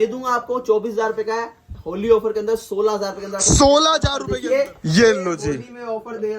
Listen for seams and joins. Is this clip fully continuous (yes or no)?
no